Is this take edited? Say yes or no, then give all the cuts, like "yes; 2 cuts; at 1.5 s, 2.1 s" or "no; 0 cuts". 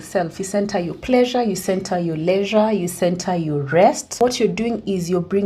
yes; 1 cut; at 4.2 s